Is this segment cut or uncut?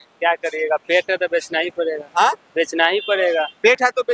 uncut